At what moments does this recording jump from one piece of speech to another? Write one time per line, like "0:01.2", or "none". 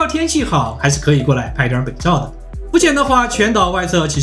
0:02.5